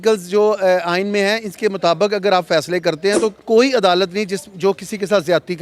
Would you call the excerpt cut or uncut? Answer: cut